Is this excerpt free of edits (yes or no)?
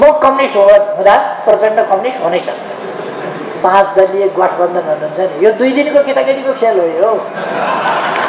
no